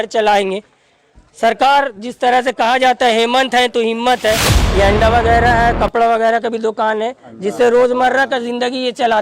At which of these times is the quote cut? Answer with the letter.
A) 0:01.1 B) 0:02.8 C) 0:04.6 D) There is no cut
C